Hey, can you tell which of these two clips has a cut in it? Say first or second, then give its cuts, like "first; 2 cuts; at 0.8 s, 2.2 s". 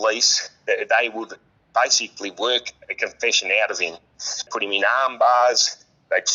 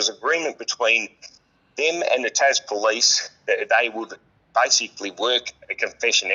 first; 1 cut; at 4.5 s